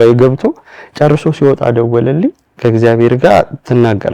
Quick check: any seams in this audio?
yes; 1 cut; at 2.5 s

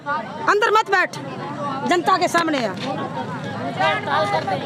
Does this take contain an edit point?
no; 0 cuts

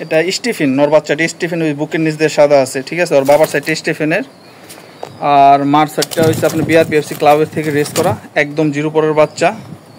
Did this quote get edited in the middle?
no; 0 cuts

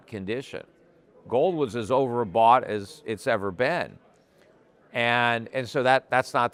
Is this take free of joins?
yes; 0 cuts

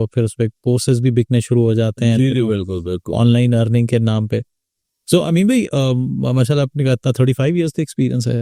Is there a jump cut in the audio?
no; 0 cuts

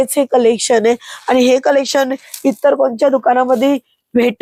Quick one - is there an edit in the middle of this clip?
no; 0 cuts

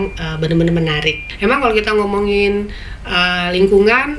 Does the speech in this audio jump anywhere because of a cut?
yes; 1 cut; at 1.2 s

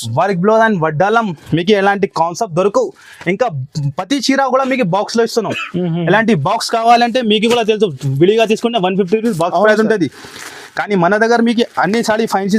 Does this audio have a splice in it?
no; 0 cuts

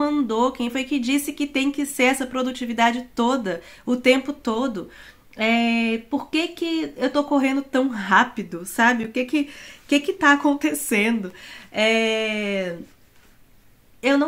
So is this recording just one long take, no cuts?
yes; 0 cuts

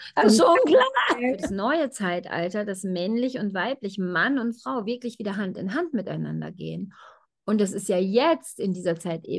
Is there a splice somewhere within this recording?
yes; 1 cut; at 1.4 s

